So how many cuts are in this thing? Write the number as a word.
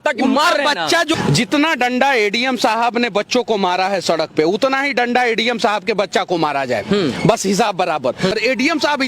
two